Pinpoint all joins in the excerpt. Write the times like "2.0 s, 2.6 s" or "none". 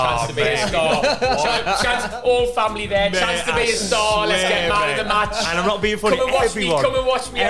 none